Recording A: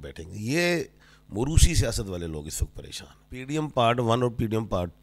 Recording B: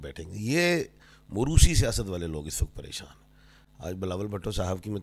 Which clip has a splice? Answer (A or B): A